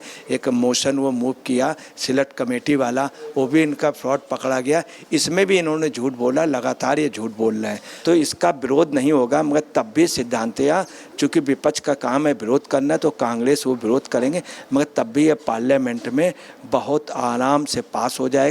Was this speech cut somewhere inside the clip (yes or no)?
yes